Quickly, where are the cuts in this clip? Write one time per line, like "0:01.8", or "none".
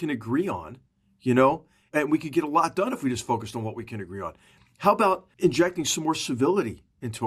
0:01.9
0:05.3